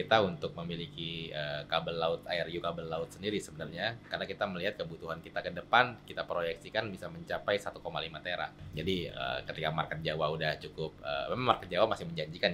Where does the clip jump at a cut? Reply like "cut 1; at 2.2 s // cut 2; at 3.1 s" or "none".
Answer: cut 1; at 8.7 s

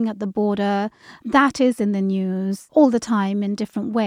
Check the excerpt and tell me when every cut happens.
cut 1; at 1.1 s // cut 2; at 2.6 s

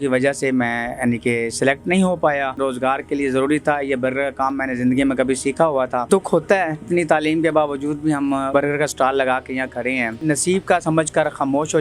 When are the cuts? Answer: cut 1; at 2.6 s // cut 2; at 6.1 s // cut 3; at 6.8 s // cut 4; at 8.5 s // cut 5; at 10.2 s

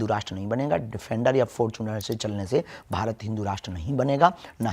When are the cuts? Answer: none

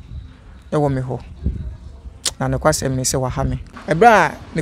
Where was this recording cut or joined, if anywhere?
cut 1; at 3.6 s

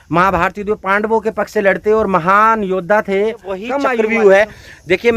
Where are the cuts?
cut 1; at 3.8 s

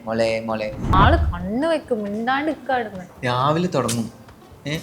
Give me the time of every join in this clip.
cut 1; at 0.9 s

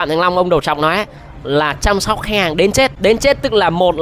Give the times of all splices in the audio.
cut 1; at 2.9 s

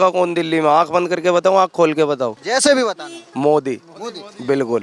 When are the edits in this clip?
cut 1; at 2.4 s

